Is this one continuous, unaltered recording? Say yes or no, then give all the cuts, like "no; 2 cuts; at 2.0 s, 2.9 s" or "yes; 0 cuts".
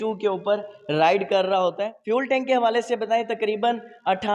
no; 1 cut; at 1.9 s